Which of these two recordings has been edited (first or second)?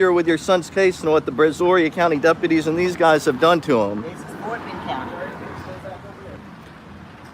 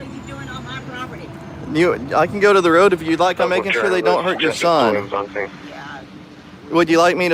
first